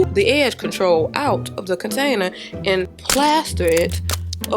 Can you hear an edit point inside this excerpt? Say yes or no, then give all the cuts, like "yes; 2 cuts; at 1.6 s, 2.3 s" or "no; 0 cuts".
yes; 1 cut; at 3.0 s